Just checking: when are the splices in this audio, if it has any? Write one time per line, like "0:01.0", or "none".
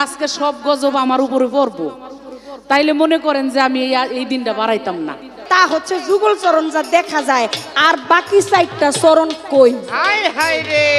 0:05.3